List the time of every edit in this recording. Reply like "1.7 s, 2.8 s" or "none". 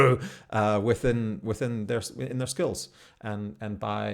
none